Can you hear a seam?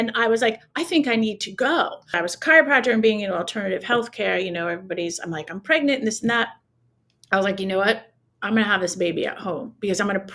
yes; 1 cut; at 2.2 s

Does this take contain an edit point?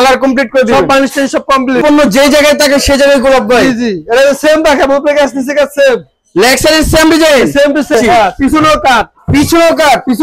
yes; 2 cuts; at 1.8 s, 7.9 s

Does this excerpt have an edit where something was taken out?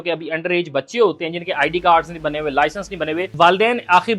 yes; 1 cut; at 3.3 s

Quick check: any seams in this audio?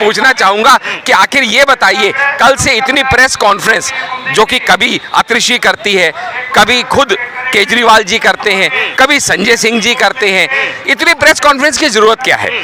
no; 0 cuts

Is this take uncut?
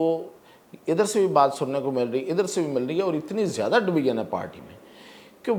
yes; 0 cuts

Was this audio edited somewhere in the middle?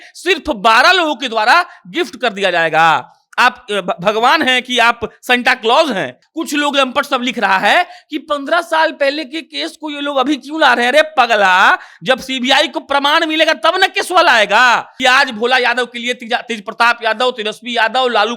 yes; 2 cuts; at 6.2 s, 14.9 s

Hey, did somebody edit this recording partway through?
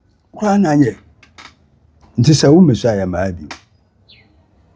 yes; 1 cut; at 1.9 s

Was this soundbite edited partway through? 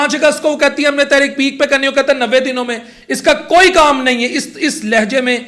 no; 0 cuts

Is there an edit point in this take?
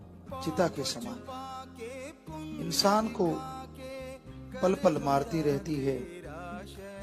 yes; 1 cut; at 6.0 s

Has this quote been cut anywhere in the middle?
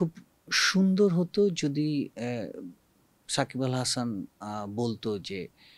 no; 0 cuts

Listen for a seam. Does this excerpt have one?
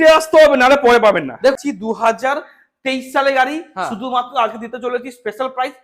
yes; 1 cut; at 1.5 s

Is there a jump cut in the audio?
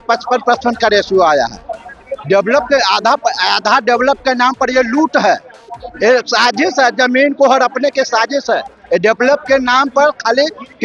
no; 0 cuts

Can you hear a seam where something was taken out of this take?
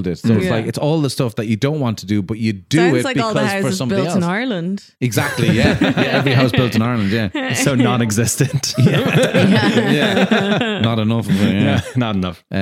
yes; 1 cut; at 7.6 s

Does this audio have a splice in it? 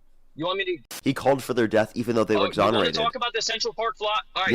yes; 1 cut; at 0.9 s

